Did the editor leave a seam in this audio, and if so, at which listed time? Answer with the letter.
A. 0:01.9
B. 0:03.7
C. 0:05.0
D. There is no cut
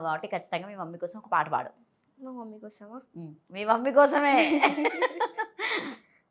D